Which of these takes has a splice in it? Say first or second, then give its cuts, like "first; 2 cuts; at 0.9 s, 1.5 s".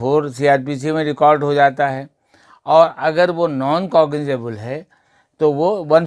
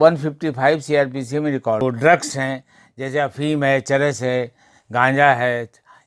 second; 1 cut; at 1.8 s